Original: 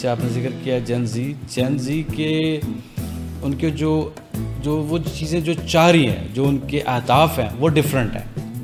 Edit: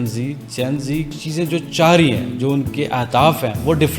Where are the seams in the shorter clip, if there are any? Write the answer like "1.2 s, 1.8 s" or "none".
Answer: 1.1 s